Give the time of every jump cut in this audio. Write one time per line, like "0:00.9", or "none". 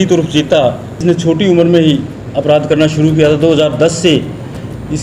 0:01.0

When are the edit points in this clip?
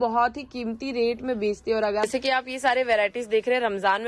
0:02.0

